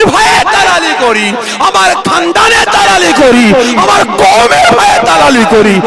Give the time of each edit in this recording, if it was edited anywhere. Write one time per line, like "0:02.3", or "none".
none